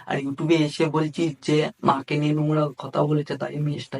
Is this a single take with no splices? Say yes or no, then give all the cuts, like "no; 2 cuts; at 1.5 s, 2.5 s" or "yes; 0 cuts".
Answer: yes; 0 cuts